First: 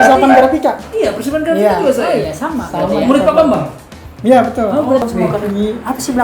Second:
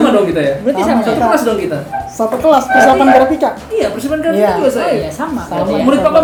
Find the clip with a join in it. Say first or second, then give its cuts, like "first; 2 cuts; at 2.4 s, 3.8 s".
first; 1 cut; at 5.0 s